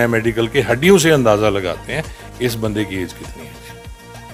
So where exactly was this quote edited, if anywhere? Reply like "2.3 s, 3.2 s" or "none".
none

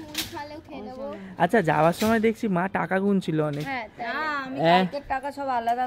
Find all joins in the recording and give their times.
none

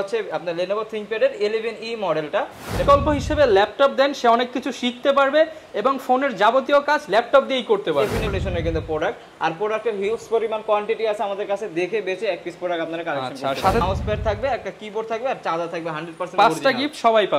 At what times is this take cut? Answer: 2.8 s, 8.3 s, 13.8 s

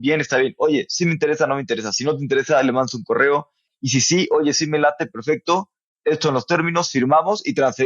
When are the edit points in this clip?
3.7 s, 5.8 s

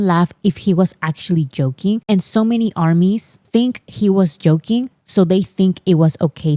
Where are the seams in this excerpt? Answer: none

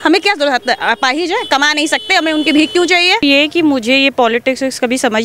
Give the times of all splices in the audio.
3.2 s

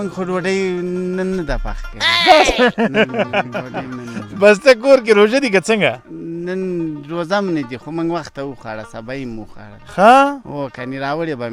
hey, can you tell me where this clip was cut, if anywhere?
none

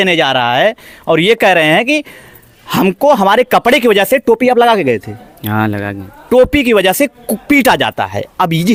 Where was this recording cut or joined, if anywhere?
none

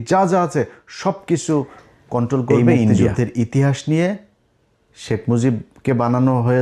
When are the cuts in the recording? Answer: 3.0 s

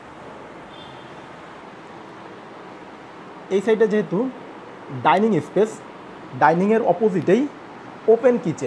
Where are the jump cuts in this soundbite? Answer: 1.6 s

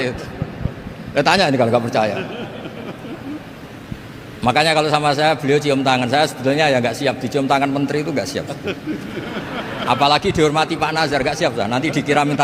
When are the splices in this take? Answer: none

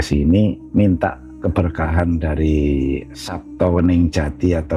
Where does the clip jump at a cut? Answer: 1.4 s, 3.1 s

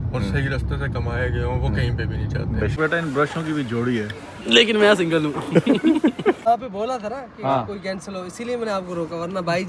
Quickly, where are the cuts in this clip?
2.7 s, 6.4 s

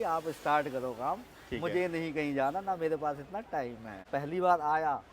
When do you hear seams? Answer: 4.1 s

